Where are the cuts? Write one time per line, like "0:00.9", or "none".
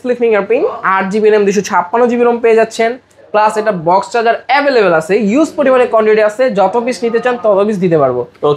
none